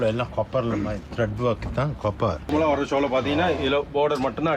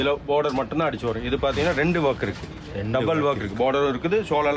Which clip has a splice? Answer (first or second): first